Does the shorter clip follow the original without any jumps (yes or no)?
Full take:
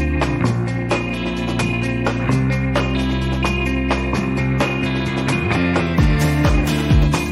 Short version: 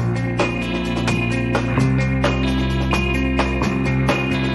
yes